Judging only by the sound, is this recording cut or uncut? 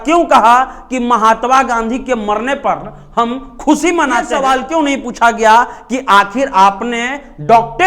cut